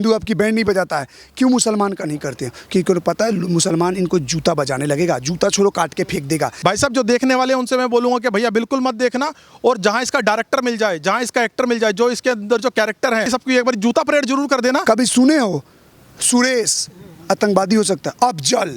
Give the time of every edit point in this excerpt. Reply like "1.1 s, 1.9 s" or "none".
6.5 s, 13.3 s, 14.8 s